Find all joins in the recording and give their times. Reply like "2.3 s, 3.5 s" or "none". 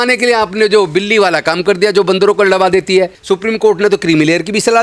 3.2 s